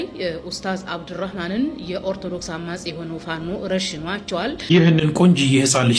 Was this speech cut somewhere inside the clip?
yes; 1 cut; at 4.6 s

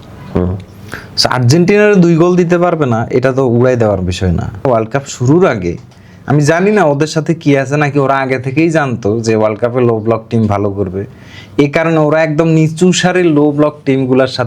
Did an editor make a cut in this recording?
yes; 1 cut; at 4.6 s

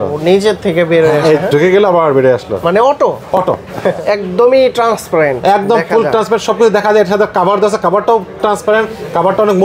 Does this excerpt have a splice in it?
yes; 1 cut; at 4.0 s

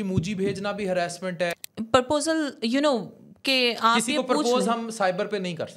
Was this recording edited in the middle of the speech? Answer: yes; 1 cut; at 1.6 s

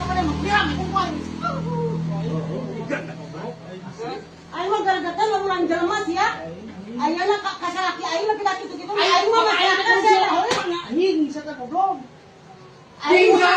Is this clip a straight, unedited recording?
yes; 0 cuts

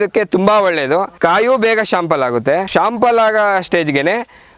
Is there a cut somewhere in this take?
yes; 2 cuts; at 1.1 s, 2.7 s

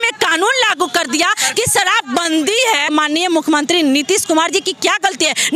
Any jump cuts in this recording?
yes; 1 cut; at 2.9 s

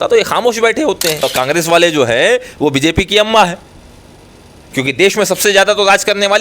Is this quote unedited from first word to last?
no; 1 cut; at 1.3 s

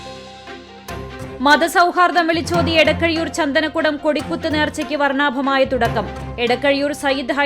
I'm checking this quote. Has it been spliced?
yes; 1 cut; at 1.4 s

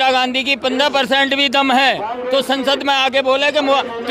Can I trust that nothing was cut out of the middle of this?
yes; 0 cuts

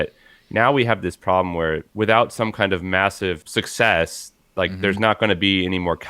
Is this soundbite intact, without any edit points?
no; 2 cuts; at 1.9 s, 3.4 s

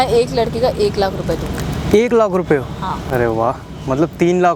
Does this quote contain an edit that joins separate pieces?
no; 0 cuts

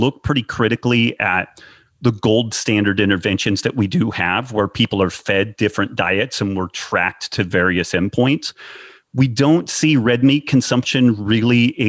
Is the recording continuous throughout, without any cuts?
yes; 0 cuts

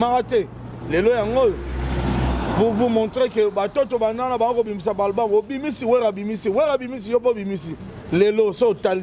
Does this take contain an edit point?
no; 0 cuts

